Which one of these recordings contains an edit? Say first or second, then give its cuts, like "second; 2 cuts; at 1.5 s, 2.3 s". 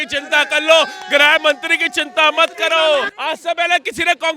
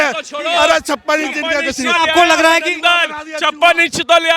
first; 1 cut; at 3.1 s